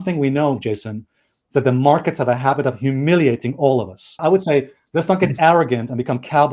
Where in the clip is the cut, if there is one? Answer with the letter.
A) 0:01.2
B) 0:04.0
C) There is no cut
C